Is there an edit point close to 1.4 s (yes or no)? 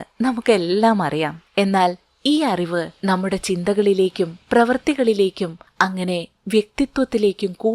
yes